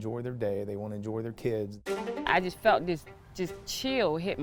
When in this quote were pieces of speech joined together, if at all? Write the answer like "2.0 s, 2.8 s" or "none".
2.3 s